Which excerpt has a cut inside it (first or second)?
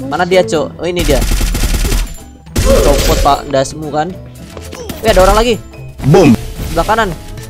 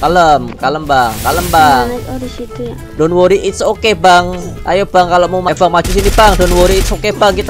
second